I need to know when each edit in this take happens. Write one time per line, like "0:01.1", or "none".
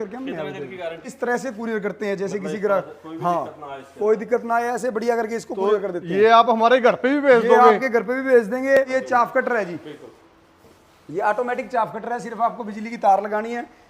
0:01.1
0:08.9